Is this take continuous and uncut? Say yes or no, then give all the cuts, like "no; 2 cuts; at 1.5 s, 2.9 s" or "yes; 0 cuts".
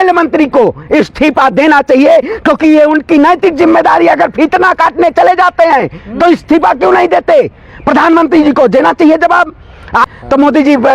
no; 1 cut; at 10.0 s